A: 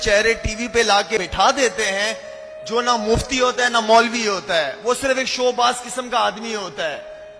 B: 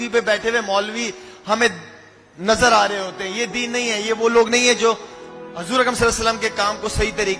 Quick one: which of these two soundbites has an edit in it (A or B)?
A